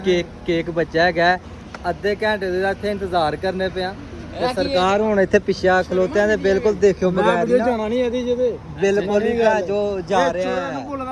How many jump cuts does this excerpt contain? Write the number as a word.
zero